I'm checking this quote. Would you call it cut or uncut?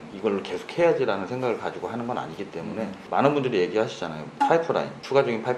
uncut